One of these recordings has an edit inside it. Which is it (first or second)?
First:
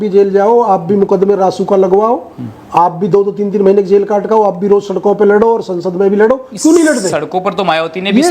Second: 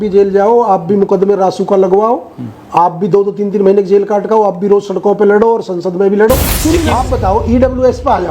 second